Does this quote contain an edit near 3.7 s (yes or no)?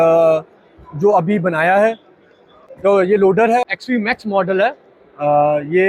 yes